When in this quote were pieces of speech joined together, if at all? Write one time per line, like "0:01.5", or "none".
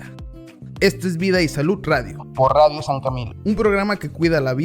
0:03.7